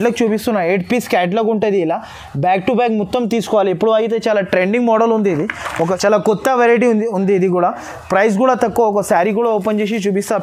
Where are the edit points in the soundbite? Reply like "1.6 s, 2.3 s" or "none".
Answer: 5.9 s